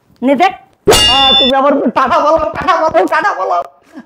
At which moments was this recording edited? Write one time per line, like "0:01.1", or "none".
0:01.2